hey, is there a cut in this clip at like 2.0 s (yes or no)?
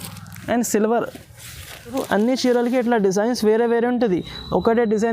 yes